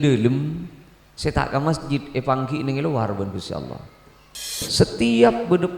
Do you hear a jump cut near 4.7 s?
yes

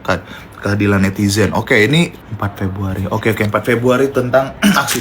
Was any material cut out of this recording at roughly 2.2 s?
yes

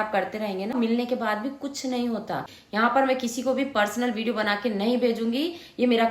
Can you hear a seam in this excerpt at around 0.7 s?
yes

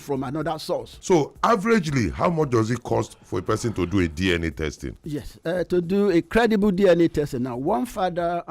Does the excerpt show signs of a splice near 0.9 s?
yes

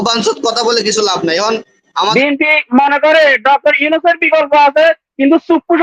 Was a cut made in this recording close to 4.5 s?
no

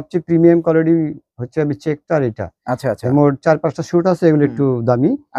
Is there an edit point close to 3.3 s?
no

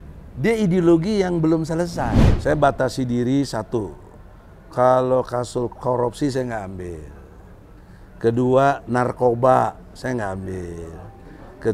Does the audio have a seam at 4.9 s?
no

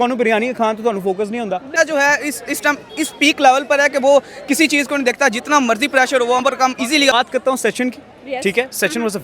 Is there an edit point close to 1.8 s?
yes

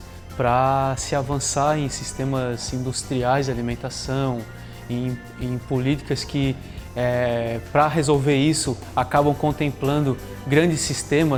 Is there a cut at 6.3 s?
no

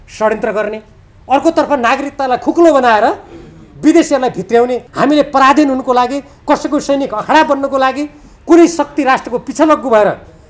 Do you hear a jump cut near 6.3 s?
no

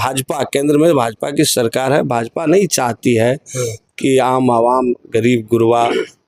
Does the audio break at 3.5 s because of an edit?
no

